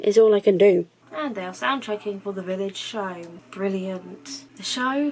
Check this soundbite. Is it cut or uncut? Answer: cut